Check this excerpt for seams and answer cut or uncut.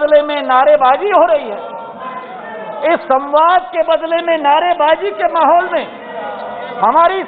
uncut